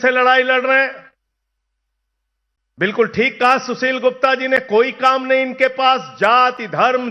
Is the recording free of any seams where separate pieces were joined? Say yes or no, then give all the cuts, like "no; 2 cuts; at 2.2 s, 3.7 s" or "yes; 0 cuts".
yes; 0 cuts